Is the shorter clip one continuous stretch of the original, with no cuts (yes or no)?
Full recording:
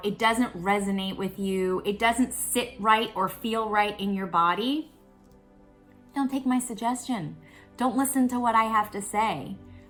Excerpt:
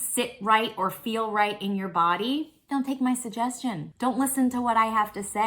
no